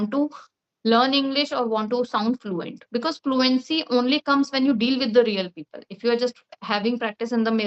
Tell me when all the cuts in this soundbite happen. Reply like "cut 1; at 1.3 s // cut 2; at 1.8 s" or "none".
none